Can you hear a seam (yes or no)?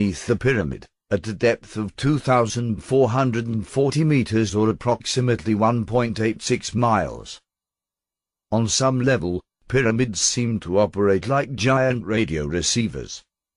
no